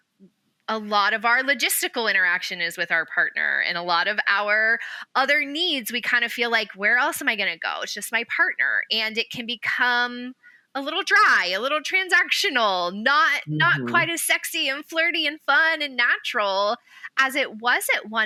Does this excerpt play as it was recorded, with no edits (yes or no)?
yes